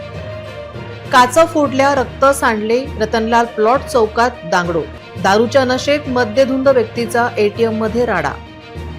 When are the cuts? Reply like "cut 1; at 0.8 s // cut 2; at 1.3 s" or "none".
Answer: cut 1; at 1.1 s